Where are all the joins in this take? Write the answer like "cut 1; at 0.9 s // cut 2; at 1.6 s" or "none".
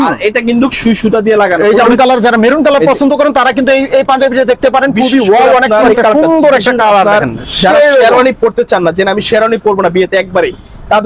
cut 1; at 1.9 s // cut 2; at 5.9 s